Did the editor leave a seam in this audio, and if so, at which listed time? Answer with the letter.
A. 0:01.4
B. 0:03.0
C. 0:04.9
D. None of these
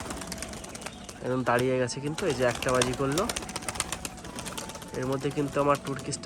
D